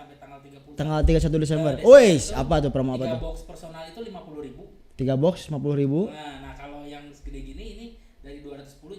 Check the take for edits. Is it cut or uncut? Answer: uncut